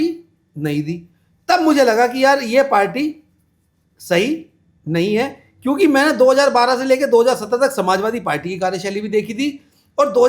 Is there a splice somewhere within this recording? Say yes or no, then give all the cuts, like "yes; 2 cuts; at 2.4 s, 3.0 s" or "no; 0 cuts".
no; 0 cuts